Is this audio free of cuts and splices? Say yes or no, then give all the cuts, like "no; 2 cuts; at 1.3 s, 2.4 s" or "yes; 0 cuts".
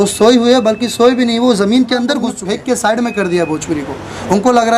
no; 1 cut; at 2.4 s